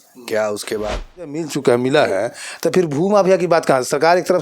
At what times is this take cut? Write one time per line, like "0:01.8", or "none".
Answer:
0:01.6